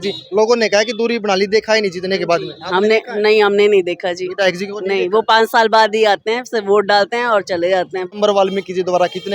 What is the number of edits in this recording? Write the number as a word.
one